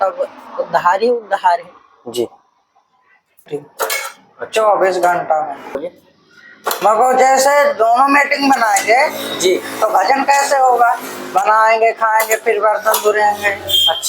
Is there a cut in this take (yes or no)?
yes